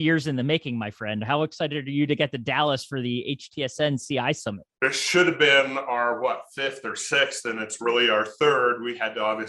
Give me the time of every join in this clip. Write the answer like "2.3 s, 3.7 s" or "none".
4.7 s